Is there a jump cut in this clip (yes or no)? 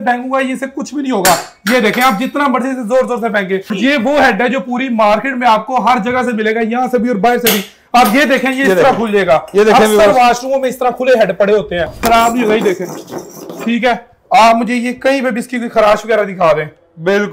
yes